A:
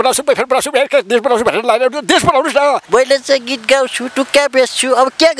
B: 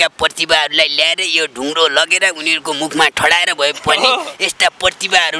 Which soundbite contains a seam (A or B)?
A